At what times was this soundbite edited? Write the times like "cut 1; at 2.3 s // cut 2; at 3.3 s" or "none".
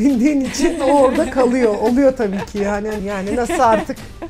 cut 1; at 3.0 s